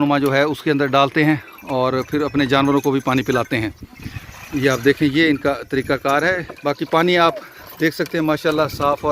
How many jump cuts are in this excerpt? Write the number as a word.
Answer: one